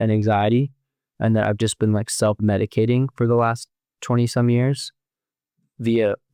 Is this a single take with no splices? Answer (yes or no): yes